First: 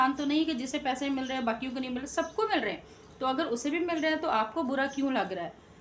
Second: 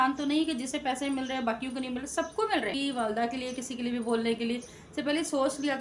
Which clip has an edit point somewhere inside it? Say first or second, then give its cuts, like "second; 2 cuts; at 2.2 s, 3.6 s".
second; 1 cut; at 2.7 s